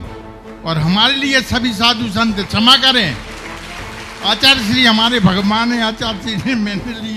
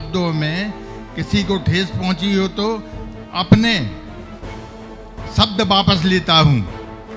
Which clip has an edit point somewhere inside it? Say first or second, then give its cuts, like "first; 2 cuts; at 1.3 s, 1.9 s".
second; 2 cuts; at 3.9 s, 5.3 s